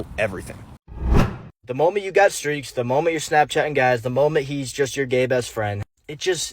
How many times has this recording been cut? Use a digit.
1